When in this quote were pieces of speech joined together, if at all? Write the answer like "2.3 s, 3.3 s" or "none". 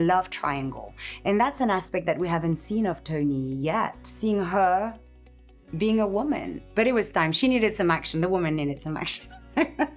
4.1 s, 6.6 s